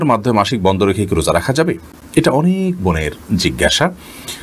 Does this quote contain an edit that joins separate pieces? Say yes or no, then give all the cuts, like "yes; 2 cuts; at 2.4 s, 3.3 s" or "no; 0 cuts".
no; 0 cuts